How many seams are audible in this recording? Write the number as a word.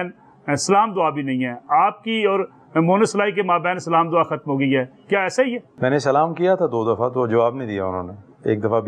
one